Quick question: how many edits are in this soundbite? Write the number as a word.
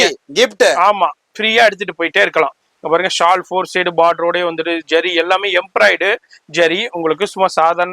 zero